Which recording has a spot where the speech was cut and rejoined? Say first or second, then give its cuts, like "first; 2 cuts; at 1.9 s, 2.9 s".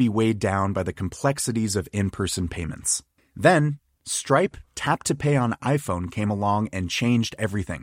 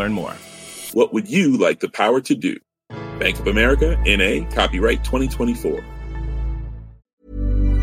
second; 1 cut; at 6.9 s